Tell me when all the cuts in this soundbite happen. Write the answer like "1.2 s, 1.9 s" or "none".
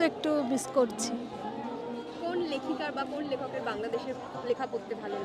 none